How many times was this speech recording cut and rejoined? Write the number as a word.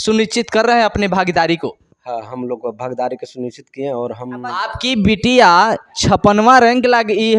one